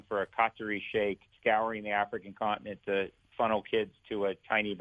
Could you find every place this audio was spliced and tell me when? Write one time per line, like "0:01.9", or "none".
0:01.3